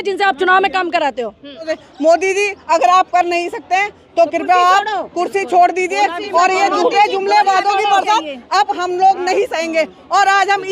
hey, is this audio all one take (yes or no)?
no